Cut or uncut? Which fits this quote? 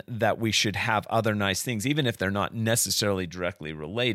uncut